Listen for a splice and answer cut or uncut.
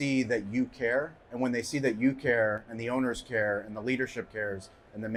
uncut